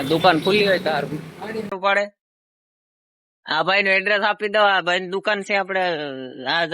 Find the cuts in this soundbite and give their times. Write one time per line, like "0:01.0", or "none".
0:01.7

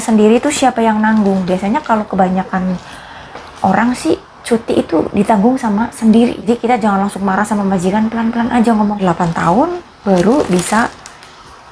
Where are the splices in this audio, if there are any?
0:06.4
0:09.0

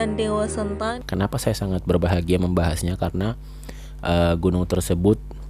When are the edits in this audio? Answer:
0:00.9

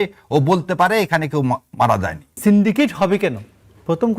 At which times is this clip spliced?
0:02.4

